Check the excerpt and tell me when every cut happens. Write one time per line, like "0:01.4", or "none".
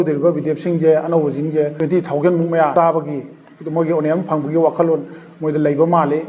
0:01.7
0:02.7